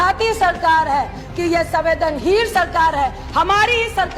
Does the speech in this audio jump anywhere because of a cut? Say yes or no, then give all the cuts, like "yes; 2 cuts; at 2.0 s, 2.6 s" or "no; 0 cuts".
yes; 1 cut; at 1.2 s